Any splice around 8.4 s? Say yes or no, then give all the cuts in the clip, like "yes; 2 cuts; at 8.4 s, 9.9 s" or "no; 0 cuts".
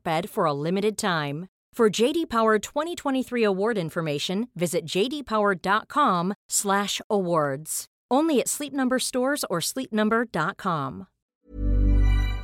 no; 1 cut; at 11.4 s